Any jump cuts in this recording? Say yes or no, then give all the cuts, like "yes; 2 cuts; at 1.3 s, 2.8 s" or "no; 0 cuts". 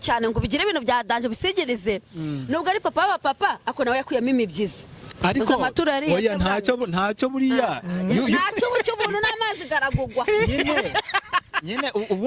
no; 0 cuts